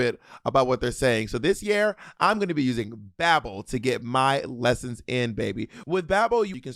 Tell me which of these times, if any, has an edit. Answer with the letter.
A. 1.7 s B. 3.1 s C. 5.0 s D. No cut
D